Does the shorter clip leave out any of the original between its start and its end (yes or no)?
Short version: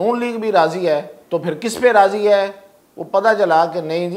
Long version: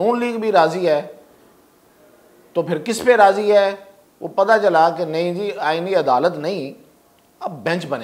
yes